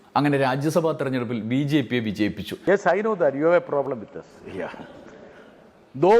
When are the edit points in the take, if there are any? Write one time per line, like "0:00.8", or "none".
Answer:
0:02.5